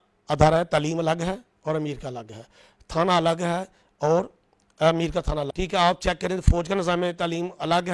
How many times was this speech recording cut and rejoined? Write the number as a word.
one